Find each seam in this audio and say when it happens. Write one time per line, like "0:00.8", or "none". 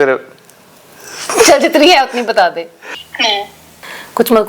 0:03.2